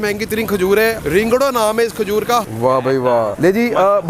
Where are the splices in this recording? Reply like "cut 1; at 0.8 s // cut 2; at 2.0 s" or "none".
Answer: cut 1; at 1.0 s // cut 2; at 2.4 s // cut 3; at 3.3 s

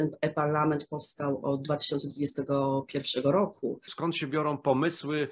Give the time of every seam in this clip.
cut 1; at 3.9 s

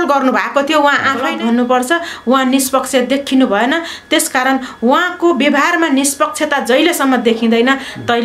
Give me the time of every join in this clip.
cut 1; at 1.3 s

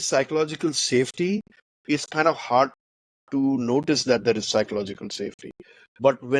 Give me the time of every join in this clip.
none

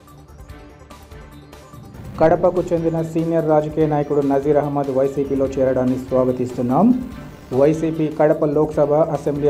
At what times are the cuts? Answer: cut 1; at 1.9 s

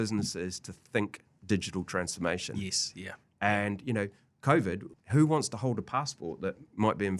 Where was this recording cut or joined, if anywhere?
cut 1; at 4.9 s

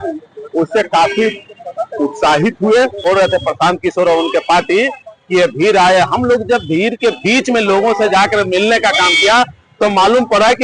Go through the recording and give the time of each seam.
cut 1; at 3.0 s

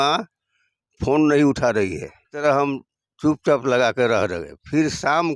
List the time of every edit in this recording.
cut 1; at 2.4 s

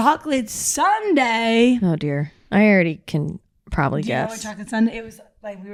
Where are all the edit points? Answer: none

